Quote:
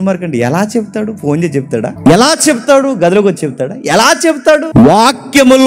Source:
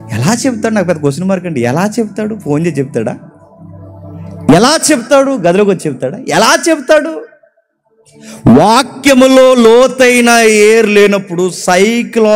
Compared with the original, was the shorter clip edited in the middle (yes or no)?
yes